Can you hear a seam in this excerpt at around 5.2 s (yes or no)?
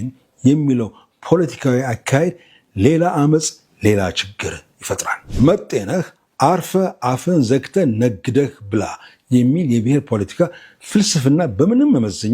yes